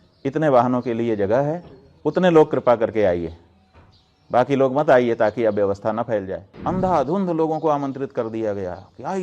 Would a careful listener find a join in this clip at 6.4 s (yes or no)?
yes